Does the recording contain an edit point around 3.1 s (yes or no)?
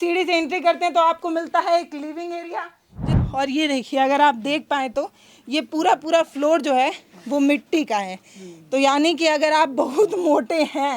yes